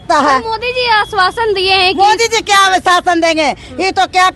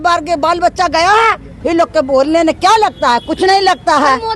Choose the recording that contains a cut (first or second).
second